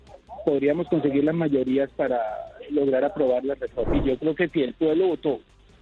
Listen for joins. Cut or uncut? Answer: cut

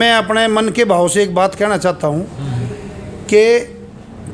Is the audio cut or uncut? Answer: uncut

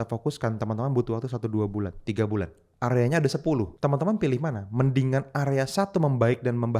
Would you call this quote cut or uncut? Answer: cut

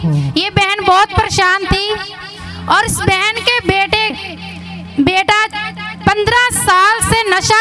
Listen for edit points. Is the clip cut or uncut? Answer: cut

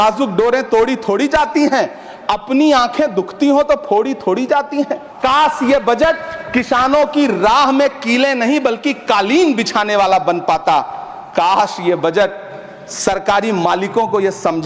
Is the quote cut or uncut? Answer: cut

